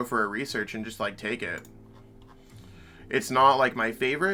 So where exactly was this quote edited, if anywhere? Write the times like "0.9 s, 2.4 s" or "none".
none